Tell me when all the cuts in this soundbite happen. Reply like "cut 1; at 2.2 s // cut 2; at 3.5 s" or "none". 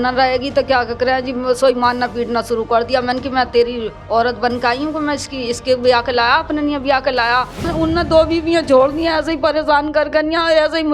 cut 1; at 7.7 s

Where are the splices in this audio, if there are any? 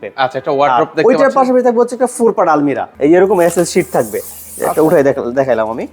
cut 1; at 2.9 s

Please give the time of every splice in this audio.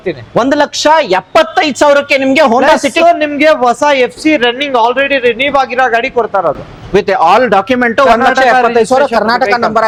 none

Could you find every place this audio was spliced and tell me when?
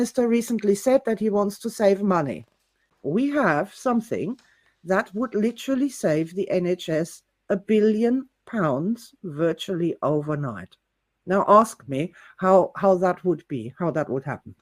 cut 1; at 2.9 s

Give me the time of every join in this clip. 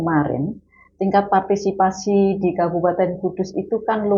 none

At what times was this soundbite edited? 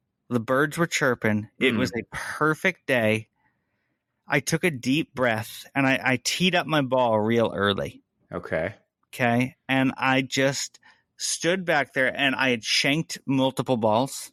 none

